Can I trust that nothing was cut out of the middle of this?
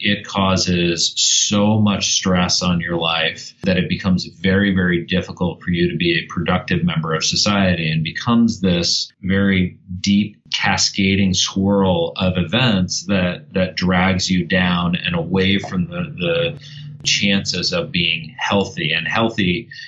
yes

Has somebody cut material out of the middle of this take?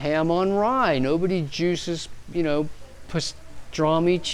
no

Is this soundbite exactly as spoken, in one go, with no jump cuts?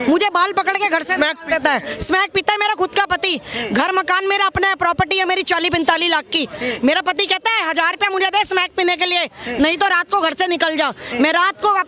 yes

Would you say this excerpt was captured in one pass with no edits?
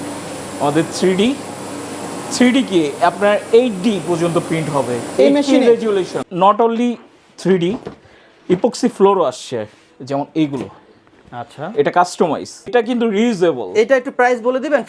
no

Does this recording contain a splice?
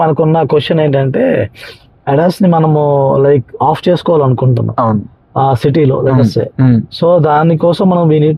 no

